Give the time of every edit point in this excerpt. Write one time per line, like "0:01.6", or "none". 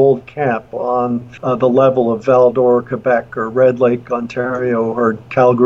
0:01.3